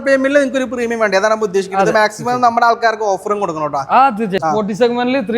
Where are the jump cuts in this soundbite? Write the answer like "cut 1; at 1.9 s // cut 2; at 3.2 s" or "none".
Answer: cut 1; at 4.4 s